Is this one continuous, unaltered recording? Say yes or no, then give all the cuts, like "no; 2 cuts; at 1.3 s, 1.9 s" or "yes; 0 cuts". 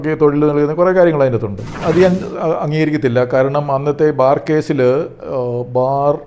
no; 1 cut; at 1.8 s